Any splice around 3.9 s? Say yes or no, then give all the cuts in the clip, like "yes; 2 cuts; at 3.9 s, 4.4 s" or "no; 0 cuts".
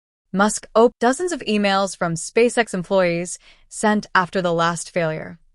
no; 1 cut; at 0.9 s